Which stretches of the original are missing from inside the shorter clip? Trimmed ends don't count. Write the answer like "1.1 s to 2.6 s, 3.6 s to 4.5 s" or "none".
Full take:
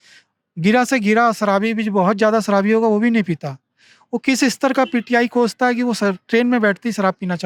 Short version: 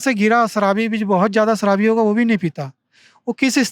none